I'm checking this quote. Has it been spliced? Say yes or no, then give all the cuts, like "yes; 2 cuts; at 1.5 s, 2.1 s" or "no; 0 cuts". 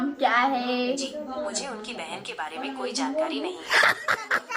yes; 1 cut; at 1.0 s